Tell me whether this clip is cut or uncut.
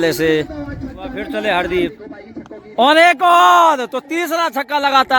cut